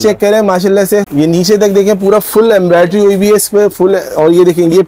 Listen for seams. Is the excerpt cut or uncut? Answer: uncut